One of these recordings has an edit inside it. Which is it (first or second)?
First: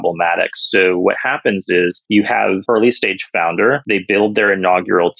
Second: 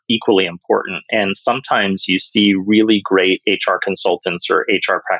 first